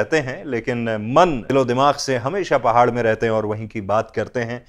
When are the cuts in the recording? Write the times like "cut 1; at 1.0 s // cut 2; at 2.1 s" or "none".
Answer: cut 1; at 1.4 s